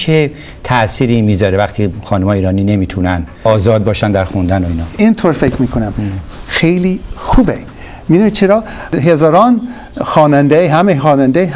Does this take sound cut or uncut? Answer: cut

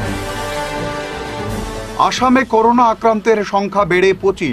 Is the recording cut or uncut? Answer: uncut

